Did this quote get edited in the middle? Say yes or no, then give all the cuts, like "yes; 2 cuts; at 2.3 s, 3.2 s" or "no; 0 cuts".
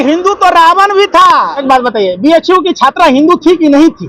yes; 1 cut; at 1.6 s